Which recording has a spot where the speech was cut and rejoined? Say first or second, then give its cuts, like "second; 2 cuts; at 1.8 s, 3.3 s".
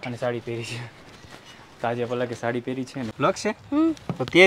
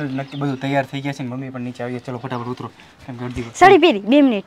first; 1 cut; at 3.0 s